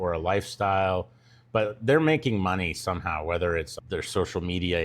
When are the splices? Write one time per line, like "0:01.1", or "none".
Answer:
0:03.7